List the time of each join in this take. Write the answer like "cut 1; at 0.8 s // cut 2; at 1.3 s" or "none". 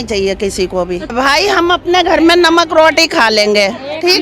cut 1; at 1.1 s